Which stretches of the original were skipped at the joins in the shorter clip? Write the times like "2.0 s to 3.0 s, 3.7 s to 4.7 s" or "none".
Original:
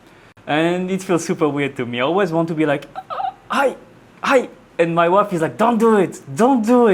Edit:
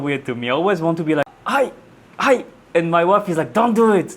2.9 s to 3.4 s

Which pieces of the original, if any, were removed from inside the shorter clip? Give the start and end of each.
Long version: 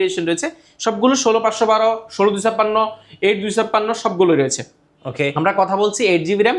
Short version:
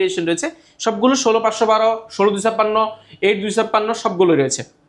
none

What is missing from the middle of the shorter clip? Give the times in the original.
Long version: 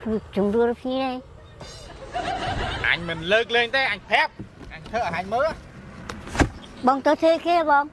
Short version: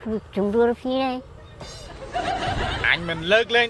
none

